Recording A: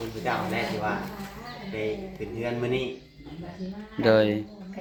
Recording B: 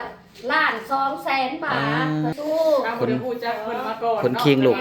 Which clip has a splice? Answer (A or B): B